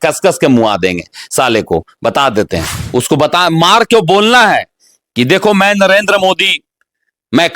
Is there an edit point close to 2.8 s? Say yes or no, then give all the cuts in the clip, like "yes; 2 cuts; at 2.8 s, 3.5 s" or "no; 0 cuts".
yes; 1 cut; at 2.8 s